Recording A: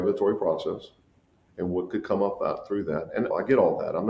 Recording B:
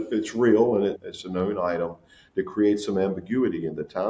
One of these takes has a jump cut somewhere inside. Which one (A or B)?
B